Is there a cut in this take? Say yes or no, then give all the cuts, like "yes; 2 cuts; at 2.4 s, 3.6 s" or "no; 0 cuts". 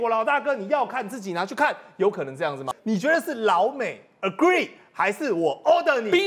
yes; 1 cut; at 2.7 s